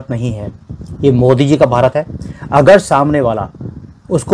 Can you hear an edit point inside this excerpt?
no; 0 cuts

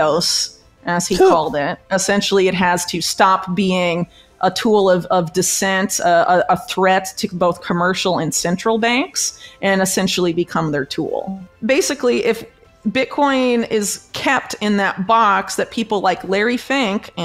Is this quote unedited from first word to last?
no; 1 cut; at 11.5 s

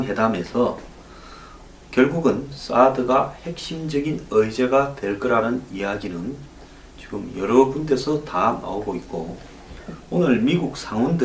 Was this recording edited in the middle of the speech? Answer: yes; 1 cut; at 4.3 s

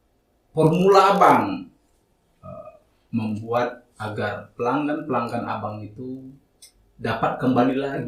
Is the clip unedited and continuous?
yes; 0 cuts

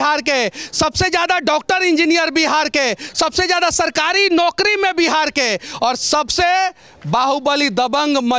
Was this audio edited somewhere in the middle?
no; 0 cuts

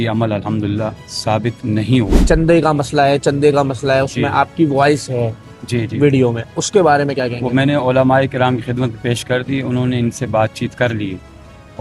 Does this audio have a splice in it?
yes; 1 cut; at 2.2 s

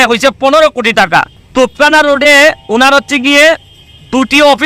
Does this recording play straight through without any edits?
yes; 0 cuts

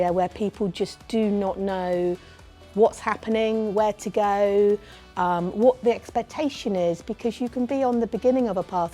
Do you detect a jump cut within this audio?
no; 0 cuts

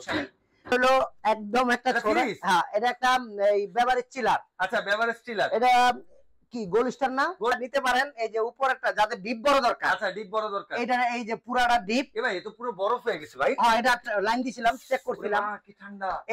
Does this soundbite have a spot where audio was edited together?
yes; 2 cuts; at 0.7 s, 7.5 s

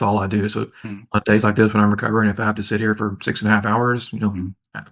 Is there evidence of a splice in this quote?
no; 0 cuts

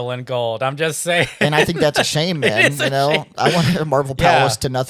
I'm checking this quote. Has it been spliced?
no; 0 cuts

